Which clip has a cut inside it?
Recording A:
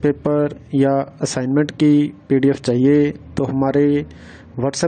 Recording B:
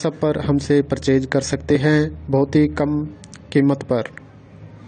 B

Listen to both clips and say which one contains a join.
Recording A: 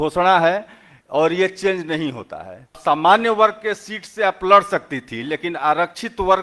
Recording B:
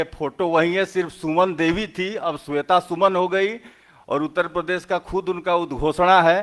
A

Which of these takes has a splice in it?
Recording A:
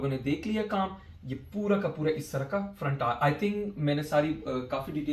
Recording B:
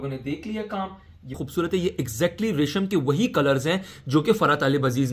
B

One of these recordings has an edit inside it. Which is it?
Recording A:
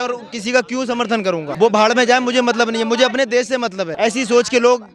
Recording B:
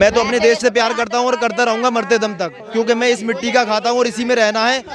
A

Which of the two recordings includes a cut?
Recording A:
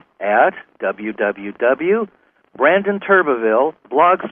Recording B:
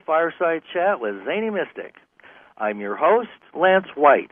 A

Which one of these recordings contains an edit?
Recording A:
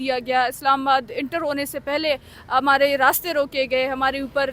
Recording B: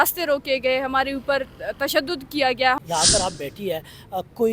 B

